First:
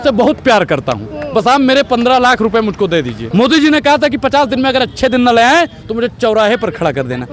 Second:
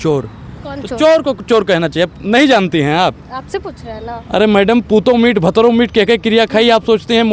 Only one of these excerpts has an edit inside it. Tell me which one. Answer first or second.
first